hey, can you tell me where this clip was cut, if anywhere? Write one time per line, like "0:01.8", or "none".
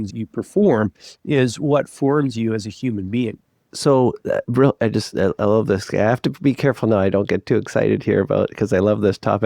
none